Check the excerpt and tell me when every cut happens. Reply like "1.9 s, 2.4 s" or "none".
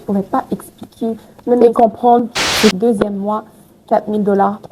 2.8 s